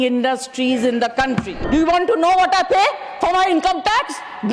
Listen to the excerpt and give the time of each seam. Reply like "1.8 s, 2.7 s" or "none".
1.6 s